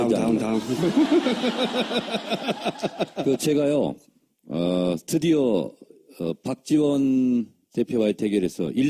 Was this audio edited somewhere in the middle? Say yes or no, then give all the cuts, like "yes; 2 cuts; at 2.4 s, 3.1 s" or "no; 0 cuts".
no; 0 cuts